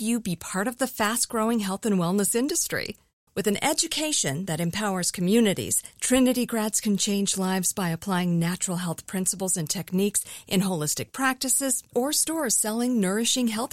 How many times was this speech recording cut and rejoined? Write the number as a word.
zero